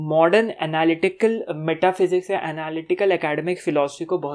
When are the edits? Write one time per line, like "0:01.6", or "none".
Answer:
none